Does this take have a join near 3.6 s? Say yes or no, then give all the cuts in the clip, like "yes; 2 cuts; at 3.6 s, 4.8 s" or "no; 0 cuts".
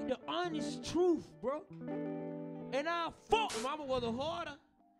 yes; 1 cut; at 3.6 s